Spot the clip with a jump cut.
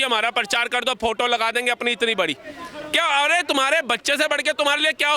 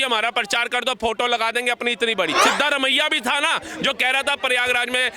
second; 1 cut; at 2.4 s

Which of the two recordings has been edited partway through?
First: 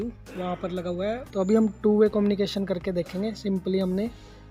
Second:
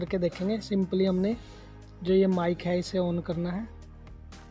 first; 1 cut; at 1.2 s

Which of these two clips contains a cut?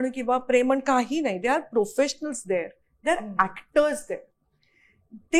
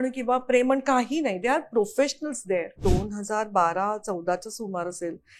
second; 1 cut; at 2.8 s

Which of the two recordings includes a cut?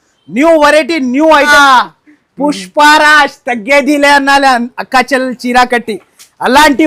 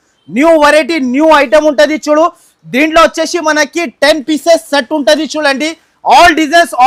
first; 1 cut; at 1.5 s

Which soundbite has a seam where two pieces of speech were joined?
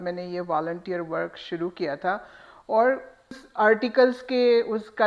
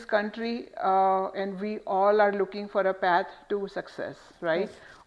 first; 1 cut; at 3.4 s

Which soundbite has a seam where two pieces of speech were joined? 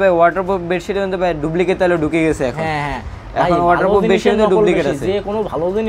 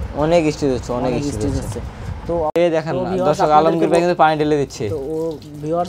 second; 1 cut; at 2.4 s

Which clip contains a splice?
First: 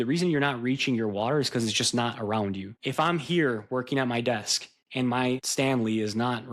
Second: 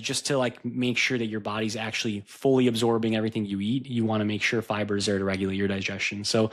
first; 2 cuts; at 2.7 s, 5.5 s

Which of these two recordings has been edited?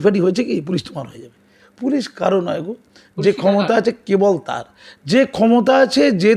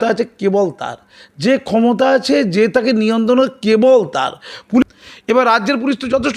second; 1 cut; at 4.8 s

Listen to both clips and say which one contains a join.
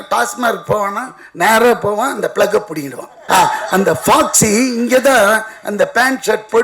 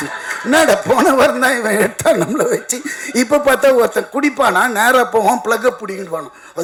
first; 1 cut; at 3.2 s

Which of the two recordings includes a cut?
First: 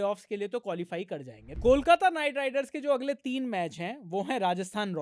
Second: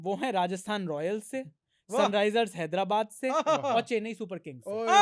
first; 1 cut; at 1.5 s

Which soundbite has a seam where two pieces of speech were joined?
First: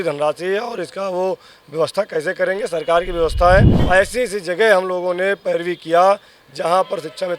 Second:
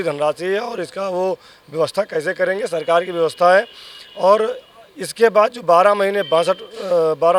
first; 1 cut; at 3.8 s

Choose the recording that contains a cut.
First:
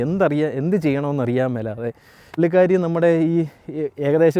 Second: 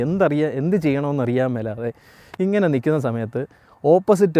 first; 1 cut; at 2.3 s

